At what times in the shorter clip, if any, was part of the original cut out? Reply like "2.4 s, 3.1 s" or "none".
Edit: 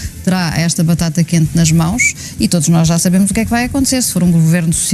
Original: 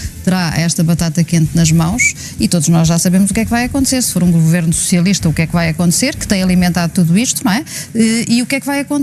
none